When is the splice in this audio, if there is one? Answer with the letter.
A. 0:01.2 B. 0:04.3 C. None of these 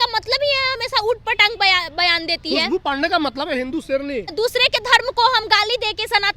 B